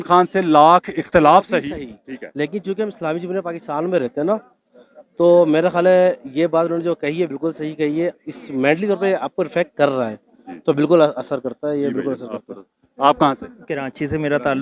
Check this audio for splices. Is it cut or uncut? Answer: uncut